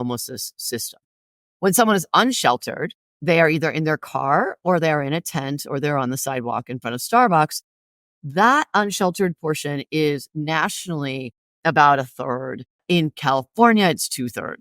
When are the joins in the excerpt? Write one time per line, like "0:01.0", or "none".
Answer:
0:12.8